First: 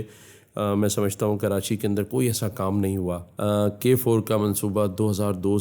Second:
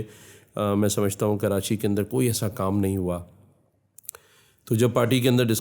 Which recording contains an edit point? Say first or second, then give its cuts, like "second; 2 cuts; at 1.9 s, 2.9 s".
first; 1 cut; at 3.3 s